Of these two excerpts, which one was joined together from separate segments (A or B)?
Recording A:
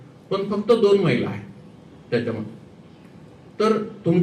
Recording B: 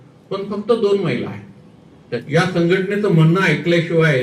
B